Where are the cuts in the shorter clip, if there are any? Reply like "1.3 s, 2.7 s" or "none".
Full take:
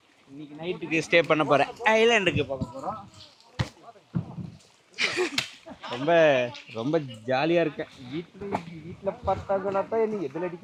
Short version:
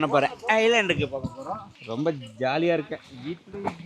1.8 s